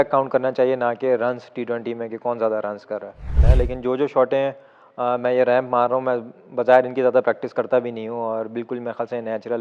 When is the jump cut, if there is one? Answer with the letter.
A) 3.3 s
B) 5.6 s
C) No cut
A